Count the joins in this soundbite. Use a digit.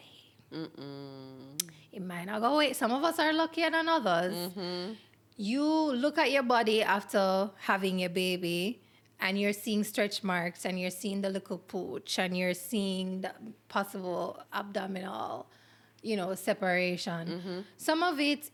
0